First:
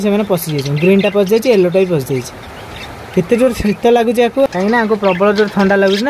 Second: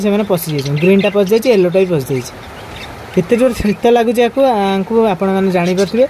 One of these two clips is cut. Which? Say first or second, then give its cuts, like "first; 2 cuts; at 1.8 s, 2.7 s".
first; 1 cut; at 4.5 s